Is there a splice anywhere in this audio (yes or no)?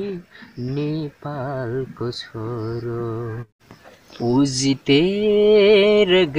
yes